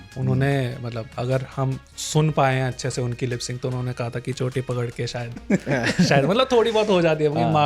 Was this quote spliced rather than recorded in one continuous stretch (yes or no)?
no